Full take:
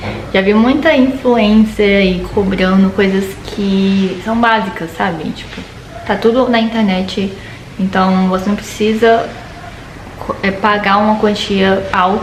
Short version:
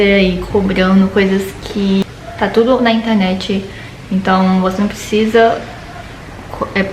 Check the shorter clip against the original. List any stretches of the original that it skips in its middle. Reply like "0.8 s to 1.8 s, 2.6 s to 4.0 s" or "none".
3.8 s to 5.7 s